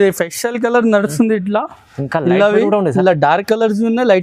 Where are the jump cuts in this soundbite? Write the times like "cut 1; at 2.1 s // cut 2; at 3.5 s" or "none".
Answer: none